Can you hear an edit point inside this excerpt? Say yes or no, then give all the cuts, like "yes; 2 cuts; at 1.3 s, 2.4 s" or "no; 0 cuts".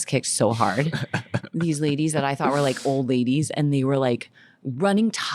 no; 0 cuts